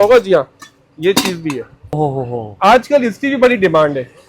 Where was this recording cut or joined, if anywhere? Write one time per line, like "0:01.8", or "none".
0:02.0